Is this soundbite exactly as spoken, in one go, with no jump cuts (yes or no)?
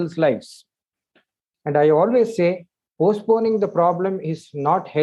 no